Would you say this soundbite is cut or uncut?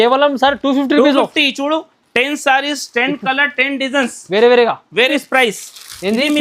cut